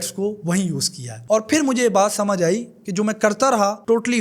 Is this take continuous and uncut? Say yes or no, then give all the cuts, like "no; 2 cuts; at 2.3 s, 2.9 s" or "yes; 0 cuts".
yes; 0 cuts